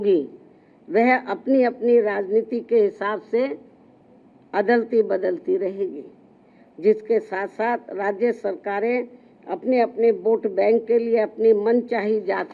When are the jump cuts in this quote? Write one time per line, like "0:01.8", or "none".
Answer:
none